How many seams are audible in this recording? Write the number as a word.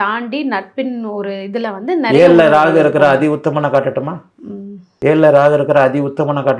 zero